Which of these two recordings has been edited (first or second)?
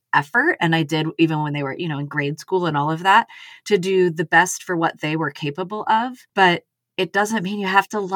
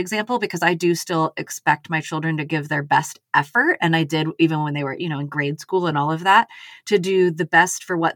first